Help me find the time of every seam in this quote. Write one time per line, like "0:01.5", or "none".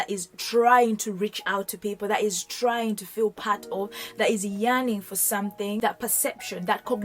0:05.8